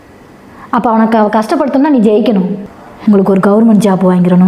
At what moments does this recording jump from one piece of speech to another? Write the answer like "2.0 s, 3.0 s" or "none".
2.9 s